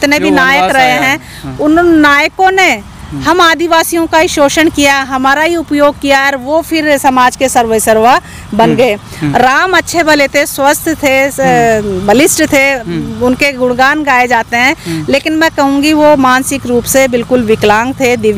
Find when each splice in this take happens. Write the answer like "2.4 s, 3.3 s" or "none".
none